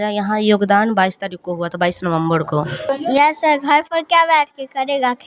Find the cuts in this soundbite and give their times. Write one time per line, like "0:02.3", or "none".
0:02.9

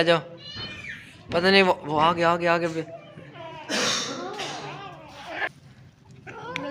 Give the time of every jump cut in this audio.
0:05.5

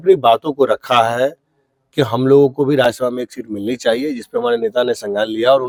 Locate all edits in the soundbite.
none

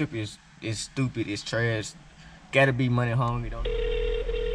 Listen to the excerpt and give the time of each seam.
0:03.4

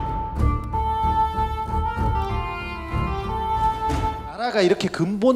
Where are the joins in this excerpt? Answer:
none

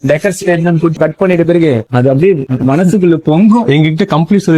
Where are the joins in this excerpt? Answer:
none

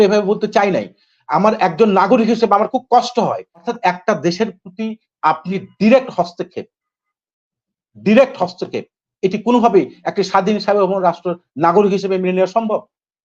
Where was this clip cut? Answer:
0:03.5

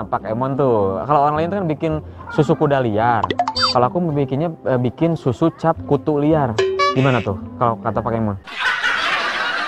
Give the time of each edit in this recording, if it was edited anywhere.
none

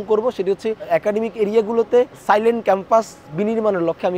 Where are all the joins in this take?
none

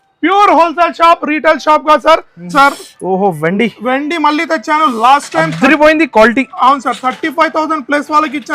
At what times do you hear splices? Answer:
0:02.5

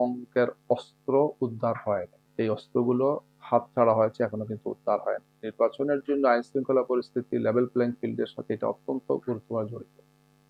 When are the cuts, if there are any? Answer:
0:02.2

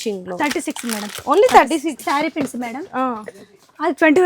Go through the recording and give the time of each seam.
0:02.0

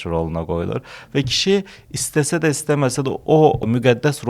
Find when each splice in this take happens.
none

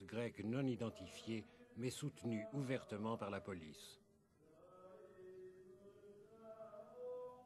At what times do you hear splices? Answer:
0:03.5

